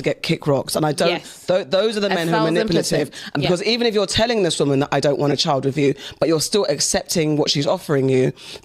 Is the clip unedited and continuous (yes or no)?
yes